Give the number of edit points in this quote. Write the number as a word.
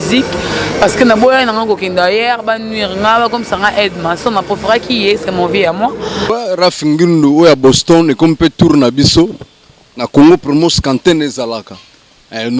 one